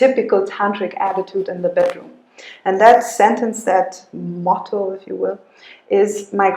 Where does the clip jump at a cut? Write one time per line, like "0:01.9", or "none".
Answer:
none